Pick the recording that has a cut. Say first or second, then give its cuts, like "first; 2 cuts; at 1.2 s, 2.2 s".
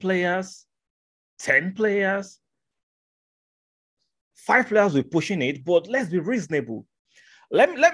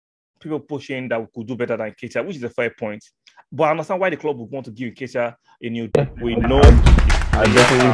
second; 1 cut; at 5.9 s